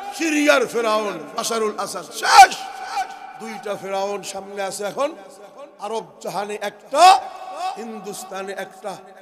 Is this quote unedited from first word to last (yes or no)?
yes